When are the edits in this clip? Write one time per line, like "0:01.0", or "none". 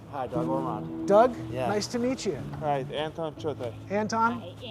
0:02.5